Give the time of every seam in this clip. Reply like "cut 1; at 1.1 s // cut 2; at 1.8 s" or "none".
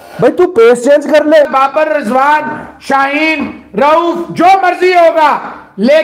cut 1; at 1.5 s